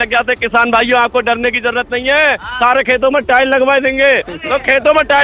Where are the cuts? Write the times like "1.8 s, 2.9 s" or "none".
none